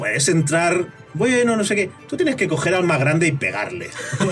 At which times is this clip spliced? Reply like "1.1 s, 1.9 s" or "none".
none

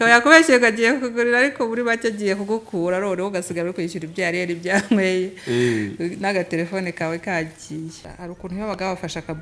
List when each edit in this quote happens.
8.1 s

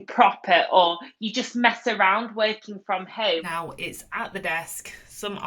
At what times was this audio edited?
3.5 s

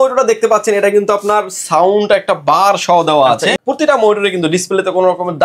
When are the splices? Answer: 3.6 s

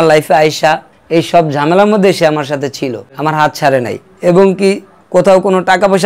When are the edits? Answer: 1.0 s, 4.9 s

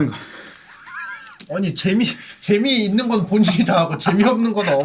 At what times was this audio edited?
none

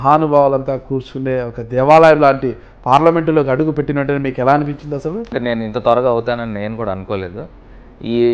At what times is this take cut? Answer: 5.3 s

